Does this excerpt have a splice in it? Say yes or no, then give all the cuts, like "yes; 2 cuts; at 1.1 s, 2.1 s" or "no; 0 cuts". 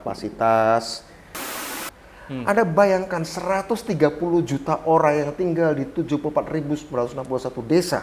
yes; 1 cut; at 1.7 s